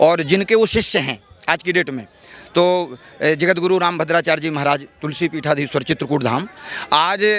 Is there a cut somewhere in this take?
no; 0 cuts

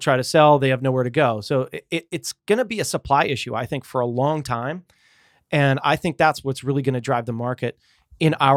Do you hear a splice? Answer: no; 0 cuts

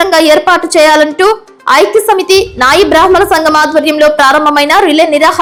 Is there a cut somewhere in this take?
no; 0 cuts

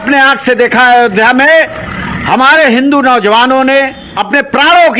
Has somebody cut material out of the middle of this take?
yes; 1 cut; at 4.0 s

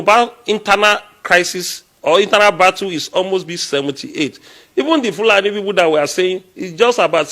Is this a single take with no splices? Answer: yes; 0 cuts

